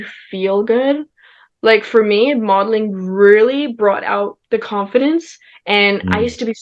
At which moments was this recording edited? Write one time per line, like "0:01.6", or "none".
none